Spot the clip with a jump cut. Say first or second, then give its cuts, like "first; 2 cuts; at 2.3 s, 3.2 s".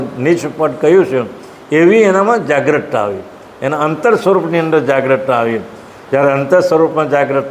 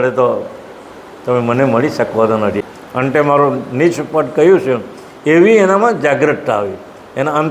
second; 1 cut; at 2.6 s